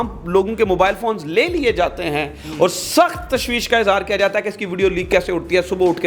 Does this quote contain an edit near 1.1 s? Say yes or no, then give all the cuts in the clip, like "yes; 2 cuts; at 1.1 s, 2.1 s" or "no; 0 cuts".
no; 0 cuts